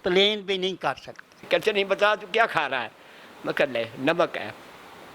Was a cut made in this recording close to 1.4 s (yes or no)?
yes